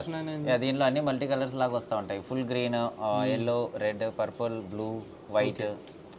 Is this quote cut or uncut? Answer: uncut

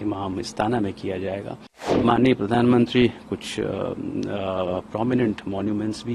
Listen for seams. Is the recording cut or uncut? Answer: cut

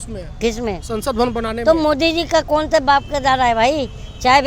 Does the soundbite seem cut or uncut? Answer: uncut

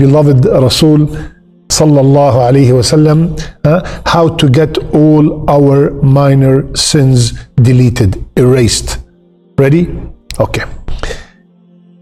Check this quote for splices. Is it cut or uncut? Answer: uncut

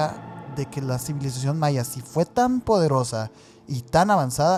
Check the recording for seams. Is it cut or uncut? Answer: uncut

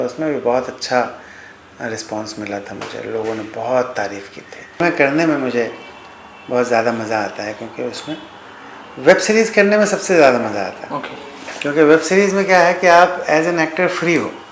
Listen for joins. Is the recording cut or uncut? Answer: cut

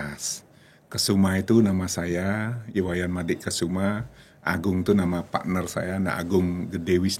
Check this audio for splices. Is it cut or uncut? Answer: uncut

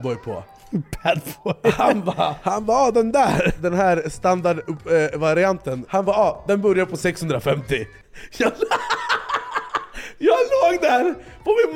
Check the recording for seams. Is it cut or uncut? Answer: cut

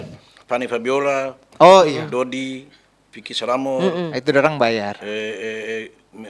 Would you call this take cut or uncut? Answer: uncut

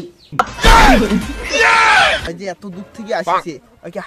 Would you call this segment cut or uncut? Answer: cut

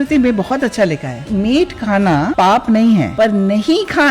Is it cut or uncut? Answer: cut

